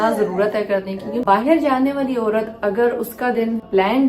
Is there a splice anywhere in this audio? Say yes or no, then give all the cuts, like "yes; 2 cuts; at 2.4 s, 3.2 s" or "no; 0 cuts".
yes; 1 cut; at 1.2 s